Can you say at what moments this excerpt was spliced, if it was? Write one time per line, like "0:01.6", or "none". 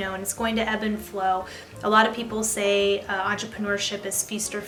none